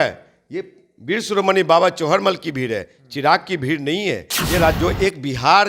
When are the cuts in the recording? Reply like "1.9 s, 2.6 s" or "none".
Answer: 4.7 s